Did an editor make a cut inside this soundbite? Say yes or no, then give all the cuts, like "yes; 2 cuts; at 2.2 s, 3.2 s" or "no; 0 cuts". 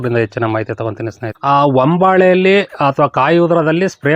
yes; 1 cut; at 1.3 s